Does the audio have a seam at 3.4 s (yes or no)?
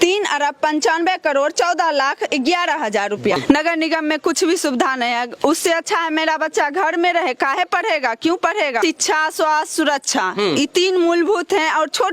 yes